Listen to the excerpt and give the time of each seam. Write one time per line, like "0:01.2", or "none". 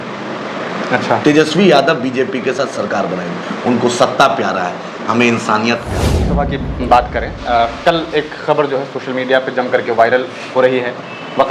0:06.3

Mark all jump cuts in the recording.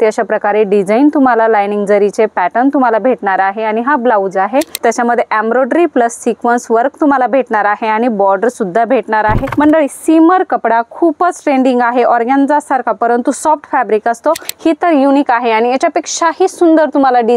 0:04.7
0:09.4
0:14.5

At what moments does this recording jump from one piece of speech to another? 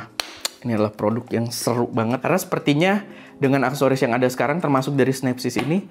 0:02.2

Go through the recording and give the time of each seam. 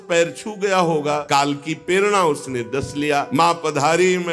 0:01.2
0:03.3

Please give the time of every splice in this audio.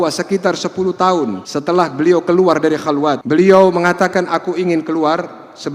0:01.5
0:03.2

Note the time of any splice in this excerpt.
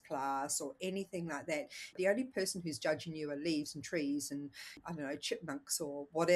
0:01.9
0:04.8

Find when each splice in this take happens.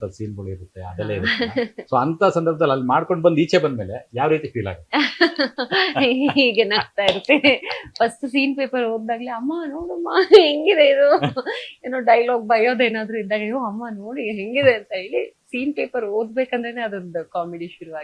none

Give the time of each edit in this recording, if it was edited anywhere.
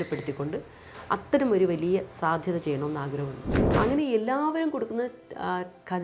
0:03.5

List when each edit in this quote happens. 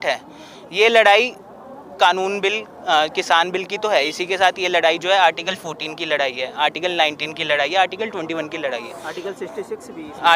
none

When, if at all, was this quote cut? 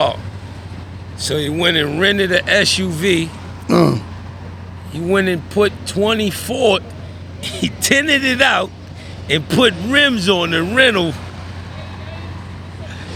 none

